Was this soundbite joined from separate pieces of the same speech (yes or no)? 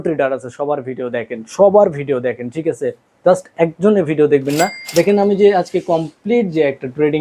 yes